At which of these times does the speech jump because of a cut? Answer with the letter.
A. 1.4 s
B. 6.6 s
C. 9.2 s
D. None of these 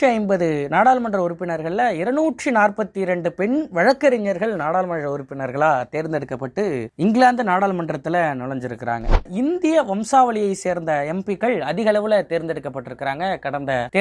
C